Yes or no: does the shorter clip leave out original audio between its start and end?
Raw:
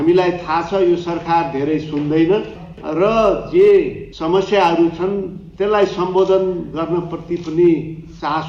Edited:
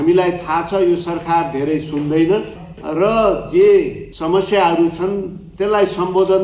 no